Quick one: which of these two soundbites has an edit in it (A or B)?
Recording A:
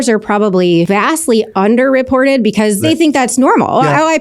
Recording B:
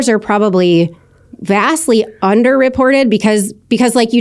A